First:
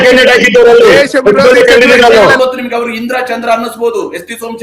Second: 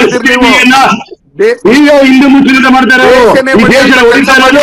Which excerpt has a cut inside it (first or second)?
first